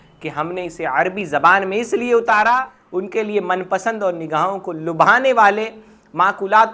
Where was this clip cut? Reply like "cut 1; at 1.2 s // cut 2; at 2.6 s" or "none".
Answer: cut 1; at 2.8 s